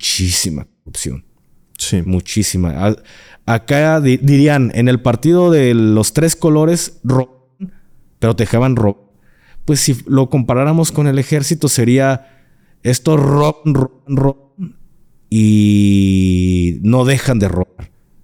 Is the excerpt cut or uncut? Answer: uncut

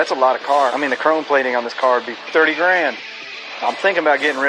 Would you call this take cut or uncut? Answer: cut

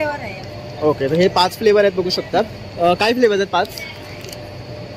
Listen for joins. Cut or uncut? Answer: uncut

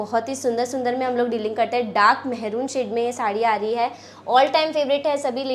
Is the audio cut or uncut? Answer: uncut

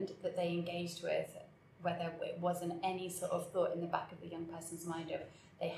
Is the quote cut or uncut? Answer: uncut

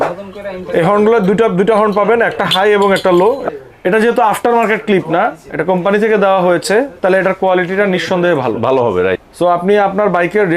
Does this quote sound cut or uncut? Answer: cut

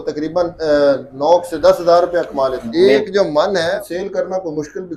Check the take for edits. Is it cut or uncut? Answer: cut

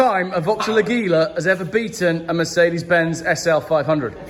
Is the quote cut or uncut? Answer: uncut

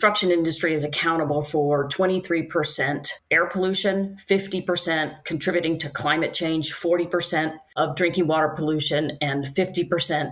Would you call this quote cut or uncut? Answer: uncut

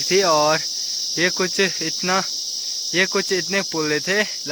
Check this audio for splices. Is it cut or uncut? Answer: uncut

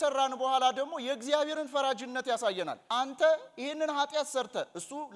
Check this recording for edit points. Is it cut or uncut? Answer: cut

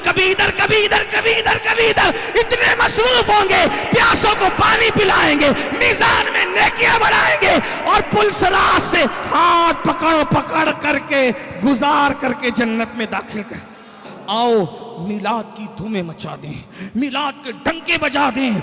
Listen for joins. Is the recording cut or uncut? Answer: cut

